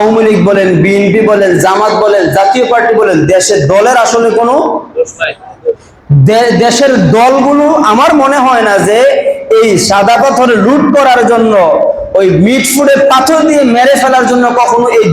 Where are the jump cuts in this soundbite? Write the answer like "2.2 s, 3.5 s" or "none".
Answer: none